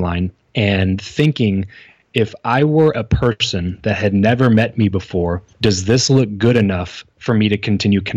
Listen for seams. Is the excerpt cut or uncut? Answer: cut